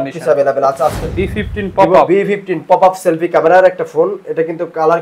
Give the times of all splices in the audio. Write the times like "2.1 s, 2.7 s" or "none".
1.0 s